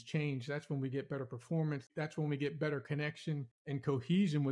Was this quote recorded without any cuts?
no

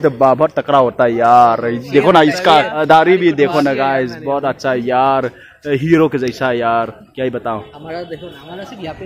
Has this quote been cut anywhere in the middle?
yes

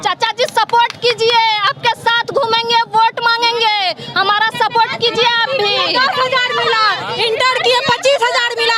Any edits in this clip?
no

